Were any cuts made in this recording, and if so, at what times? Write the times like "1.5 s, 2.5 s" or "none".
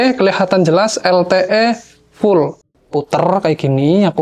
2.8 s

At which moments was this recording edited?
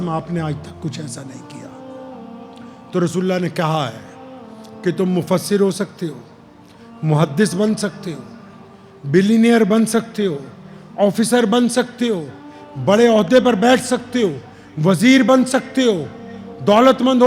1.5 s, 2.7 s

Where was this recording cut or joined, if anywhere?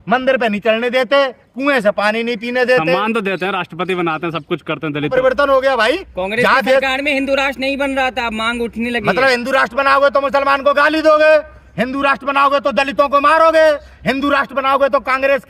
5.1 s

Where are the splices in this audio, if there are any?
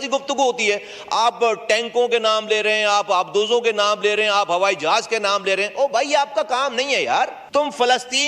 7.4 s

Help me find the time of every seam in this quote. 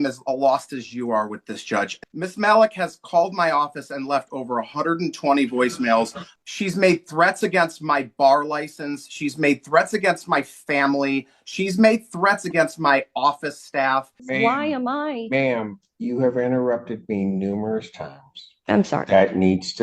2.0 s, 6.2 s, 14.2 s

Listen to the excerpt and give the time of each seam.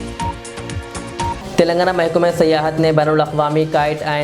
none

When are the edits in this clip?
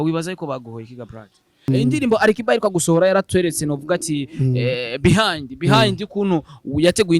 1.7 s

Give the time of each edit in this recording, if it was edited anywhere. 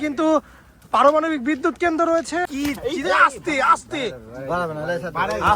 2.5 s

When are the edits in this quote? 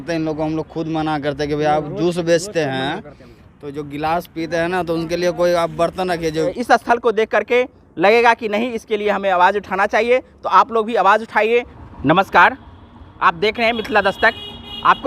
6.6 s, 11.7 s

